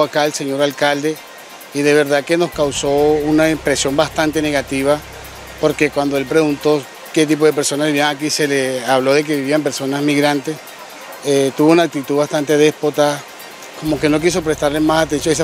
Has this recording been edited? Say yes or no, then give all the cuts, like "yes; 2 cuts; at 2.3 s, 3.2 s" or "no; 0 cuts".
no; 0 cuts